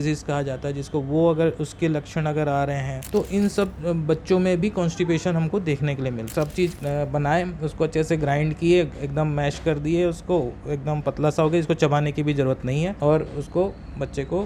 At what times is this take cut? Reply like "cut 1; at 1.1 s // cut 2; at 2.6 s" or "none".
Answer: cut 1; at 2.9 s // cut 2; at 3.8 s // cut 3; at 6.3 s // cut 4; at 13.0 s